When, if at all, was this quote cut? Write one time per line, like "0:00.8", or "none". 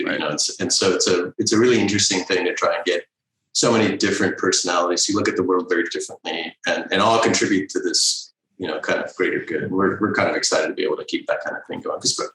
none